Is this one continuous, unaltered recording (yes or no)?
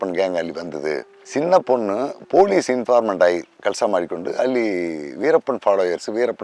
yes